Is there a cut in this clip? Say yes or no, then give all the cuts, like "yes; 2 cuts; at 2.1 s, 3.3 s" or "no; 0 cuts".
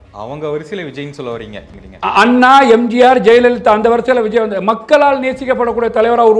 yes; 1 cut; at 1.7 s